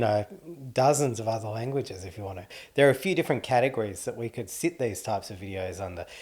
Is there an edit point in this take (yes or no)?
no